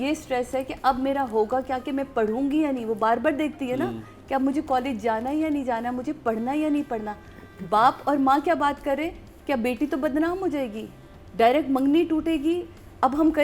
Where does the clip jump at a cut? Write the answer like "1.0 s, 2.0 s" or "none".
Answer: none